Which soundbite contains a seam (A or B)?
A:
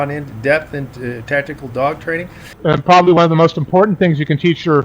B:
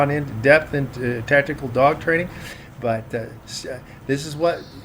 A